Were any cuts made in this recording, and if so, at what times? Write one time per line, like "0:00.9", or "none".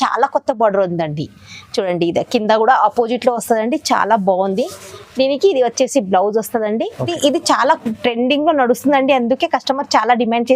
0:07.1